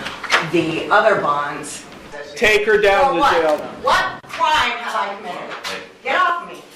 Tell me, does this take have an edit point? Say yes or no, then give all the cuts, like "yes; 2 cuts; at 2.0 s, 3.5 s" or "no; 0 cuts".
yes; 1 cut; at 2.1 s